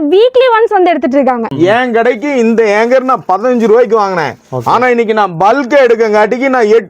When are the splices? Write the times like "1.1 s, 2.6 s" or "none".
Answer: 1.5 s